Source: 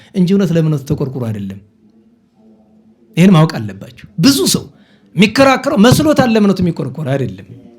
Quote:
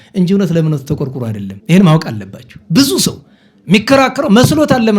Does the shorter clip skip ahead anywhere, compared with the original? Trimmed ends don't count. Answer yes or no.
yes